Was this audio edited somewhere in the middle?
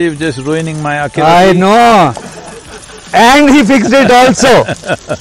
no; 0 cuts

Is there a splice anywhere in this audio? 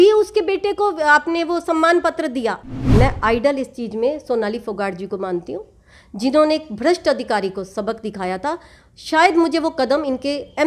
yes; 1 cut; at 2.6 s

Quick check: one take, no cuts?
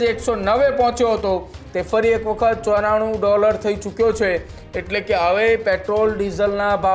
yes; 0 cuts

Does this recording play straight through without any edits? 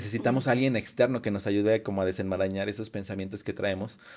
yes; 0 cuts

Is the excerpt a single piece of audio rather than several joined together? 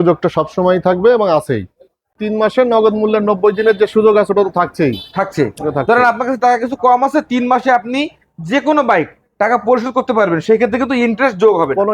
no; 1 cut; at 2.2 s

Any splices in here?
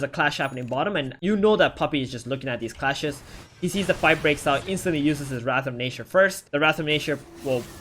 yes; 1 cut; at 1.1 s

